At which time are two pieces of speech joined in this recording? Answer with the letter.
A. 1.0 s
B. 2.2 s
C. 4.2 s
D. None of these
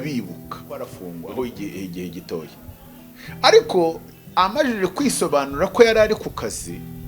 A